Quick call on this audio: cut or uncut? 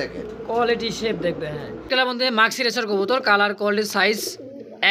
cut